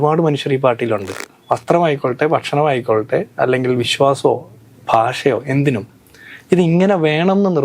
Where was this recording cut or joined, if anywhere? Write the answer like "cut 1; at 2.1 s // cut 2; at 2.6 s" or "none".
cut 1; at 1.2 s